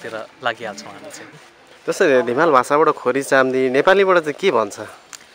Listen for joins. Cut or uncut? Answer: cut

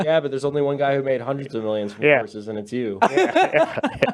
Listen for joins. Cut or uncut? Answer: uncut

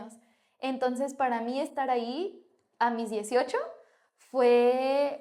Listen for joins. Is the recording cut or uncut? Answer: uncut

